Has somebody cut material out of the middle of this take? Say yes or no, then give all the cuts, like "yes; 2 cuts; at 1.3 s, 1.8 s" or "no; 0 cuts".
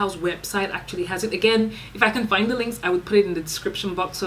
no; 0 cuts